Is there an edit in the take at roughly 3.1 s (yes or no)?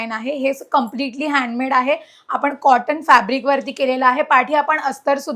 no